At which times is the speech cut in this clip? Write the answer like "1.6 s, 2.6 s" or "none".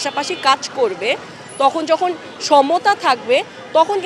none